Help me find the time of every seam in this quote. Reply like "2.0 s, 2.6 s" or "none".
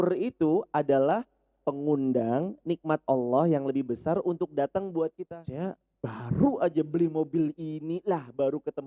5.3 s